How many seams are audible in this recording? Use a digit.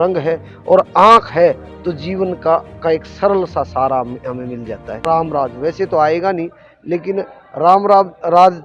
1